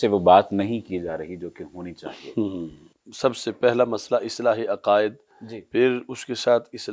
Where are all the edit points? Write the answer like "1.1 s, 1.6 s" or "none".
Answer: 2.9 s

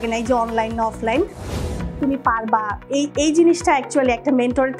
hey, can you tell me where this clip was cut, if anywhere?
1.7 s

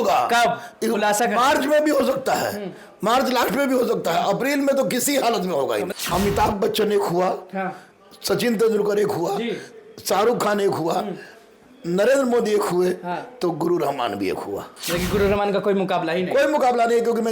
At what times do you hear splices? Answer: 5.9 s

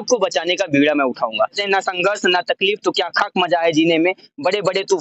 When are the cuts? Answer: 1.6 s

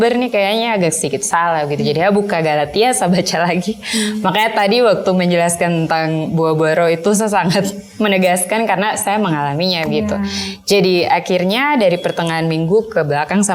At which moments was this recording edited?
none

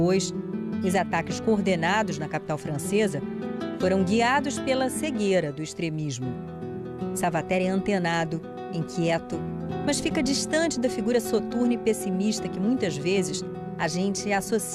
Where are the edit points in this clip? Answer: 3.0 s

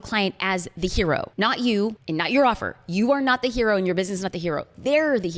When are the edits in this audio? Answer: none

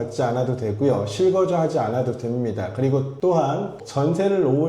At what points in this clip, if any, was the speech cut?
3.7 s

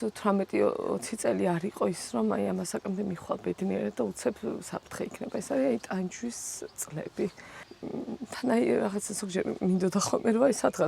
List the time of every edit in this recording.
7.5 s

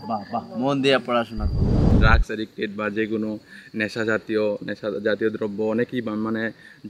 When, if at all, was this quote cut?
1.9 s

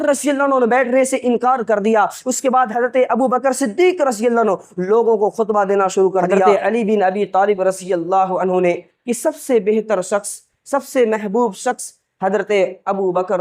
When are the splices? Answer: 6.5 s

